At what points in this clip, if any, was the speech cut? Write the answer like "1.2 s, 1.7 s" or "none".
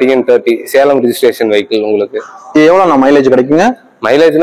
none

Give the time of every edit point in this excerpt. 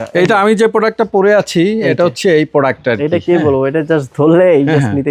none

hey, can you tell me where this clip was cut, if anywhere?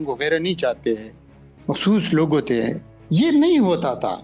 2.9 s

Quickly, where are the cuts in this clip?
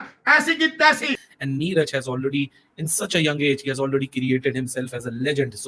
1.2 s

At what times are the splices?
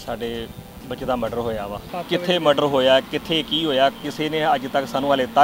1.8 s

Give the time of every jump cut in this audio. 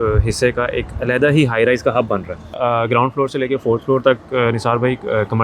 2.5 s

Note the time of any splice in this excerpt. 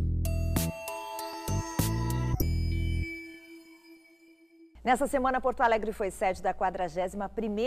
1.3 s, 4.7 s

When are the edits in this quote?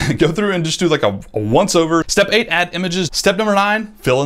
2.1 s, 3.1 s

